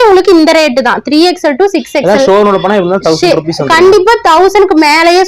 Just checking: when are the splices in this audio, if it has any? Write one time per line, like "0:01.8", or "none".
none